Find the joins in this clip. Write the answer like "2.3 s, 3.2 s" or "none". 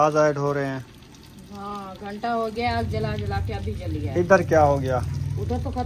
none